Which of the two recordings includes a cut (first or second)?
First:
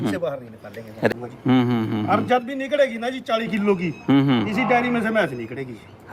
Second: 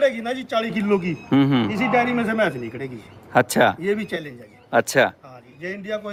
first